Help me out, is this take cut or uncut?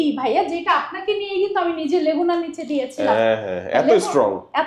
uncut